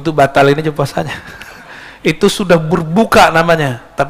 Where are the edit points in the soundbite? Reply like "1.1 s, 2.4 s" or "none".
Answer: none